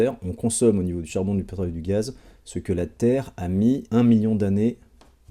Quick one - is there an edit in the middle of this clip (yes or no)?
yes